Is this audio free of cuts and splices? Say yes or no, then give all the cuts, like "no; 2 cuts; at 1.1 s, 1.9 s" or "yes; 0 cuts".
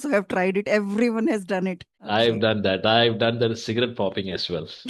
no; 1 cut; at 1.9 s